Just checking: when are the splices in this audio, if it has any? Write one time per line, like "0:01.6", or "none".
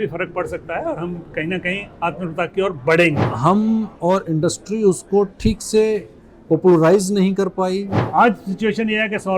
0:03.3
0:07.9

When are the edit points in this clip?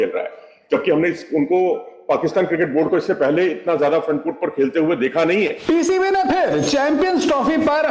0:05.6

